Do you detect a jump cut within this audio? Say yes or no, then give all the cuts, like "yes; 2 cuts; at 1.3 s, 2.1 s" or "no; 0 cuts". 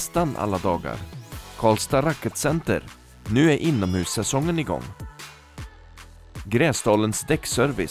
no; 0 cuts